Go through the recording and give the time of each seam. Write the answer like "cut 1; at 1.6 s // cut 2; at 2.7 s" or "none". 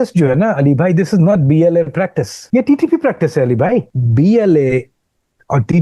cut 1; at 2.3 s // cut 2; at 4.0 s